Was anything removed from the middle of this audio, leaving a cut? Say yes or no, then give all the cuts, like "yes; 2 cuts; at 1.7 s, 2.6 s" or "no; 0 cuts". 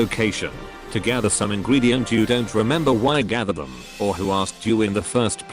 no; 0 cuts